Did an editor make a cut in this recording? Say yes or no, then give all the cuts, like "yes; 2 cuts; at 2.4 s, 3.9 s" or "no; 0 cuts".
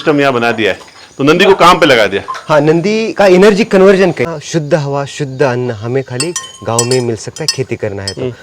yes; 1 cut; at 4.2 s